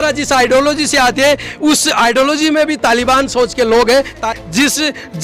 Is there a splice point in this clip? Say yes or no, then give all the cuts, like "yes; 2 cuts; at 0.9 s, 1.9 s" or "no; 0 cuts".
yes; 1 cut; at 4.2 s